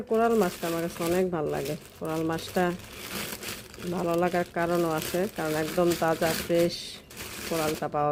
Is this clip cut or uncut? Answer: uncut